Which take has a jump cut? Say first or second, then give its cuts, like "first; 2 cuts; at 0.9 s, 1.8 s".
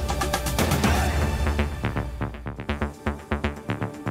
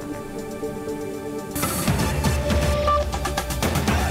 first; 1 cut; at 2.6 s